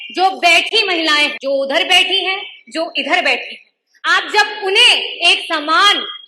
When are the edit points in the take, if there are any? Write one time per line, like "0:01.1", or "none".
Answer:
0:01.3